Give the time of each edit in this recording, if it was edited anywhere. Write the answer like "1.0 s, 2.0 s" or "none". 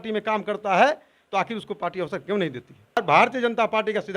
3.0 s